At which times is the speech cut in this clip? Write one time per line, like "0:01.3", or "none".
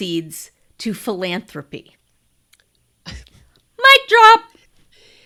none